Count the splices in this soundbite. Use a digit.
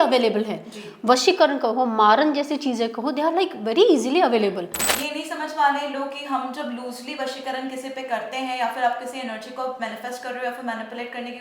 1